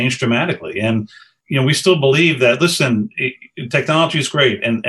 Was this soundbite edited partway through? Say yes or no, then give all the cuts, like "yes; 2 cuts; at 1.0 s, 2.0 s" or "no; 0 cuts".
yes; 1 cut; at 1.3 s